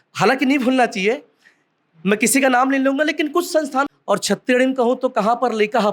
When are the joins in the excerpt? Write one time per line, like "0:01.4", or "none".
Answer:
0:03.9